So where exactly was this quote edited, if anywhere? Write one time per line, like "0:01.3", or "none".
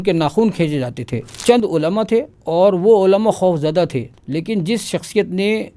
0:01.3
0:02.4
0:04.2